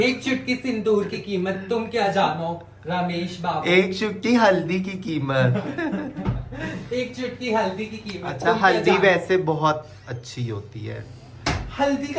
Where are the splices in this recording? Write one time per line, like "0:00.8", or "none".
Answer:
none